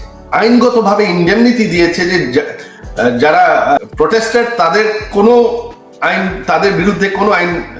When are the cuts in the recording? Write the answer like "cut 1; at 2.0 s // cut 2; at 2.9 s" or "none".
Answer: cut 1; at 3.8 s